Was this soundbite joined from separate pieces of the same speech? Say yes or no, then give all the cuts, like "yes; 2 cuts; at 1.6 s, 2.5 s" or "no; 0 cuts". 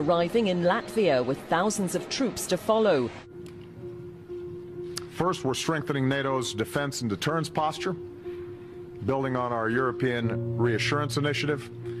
yes; 1 cut; at 7.2 s